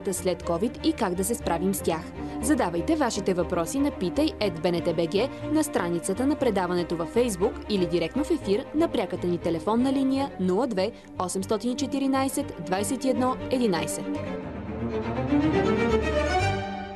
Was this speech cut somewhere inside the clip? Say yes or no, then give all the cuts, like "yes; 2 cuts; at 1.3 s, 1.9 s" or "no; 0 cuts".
yes; 1 cut; at 13.8 s